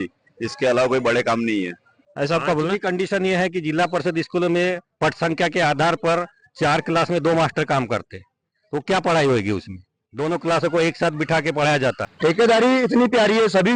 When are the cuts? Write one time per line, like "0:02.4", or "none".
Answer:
0:02.0
0:12.1